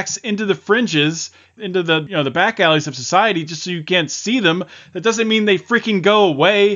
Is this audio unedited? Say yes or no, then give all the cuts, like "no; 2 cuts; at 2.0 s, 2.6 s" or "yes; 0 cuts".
no; 1 cut; at 1.7 s